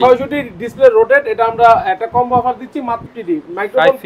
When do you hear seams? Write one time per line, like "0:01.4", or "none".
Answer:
0:03.0